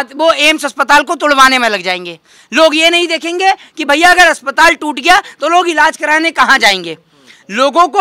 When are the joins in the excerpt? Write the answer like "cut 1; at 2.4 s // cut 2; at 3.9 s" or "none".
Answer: none